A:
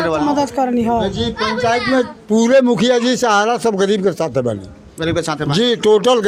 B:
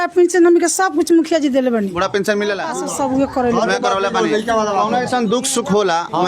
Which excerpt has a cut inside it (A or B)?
B